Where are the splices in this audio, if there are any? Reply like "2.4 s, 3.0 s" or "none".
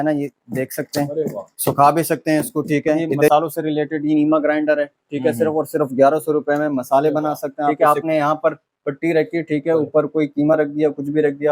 3.3 s, 7.7 s